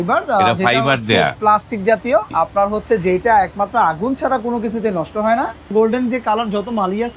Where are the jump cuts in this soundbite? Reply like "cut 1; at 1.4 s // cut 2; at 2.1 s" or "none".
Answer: cut 1; at 2.3 s // cut 2; at 5.7 s